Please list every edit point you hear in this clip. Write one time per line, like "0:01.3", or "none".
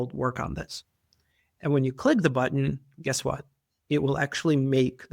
none